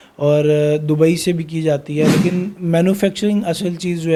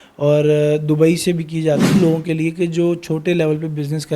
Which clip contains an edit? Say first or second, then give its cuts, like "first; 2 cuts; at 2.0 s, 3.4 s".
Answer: second; 1 cut; at 1.9 s